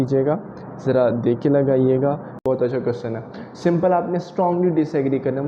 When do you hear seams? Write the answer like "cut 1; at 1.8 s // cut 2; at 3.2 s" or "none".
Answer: cut 1; at 2.4 s